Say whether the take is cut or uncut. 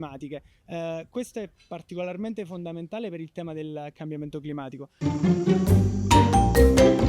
cut